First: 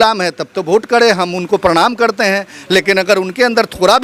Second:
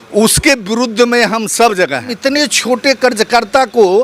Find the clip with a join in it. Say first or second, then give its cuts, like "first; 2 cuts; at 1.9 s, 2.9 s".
second; 1 cut; at 2.1 s